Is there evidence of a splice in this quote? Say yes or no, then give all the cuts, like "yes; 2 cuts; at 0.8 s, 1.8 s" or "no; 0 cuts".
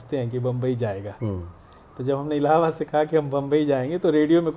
no; 0 cuts